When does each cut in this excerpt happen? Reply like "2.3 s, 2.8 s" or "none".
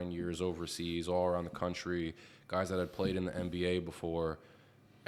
none